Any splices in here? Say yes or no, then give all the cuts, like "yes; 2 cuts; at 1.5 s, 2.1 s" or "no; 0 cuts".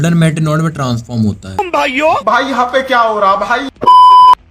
yes; 1 cut; at 1.6 s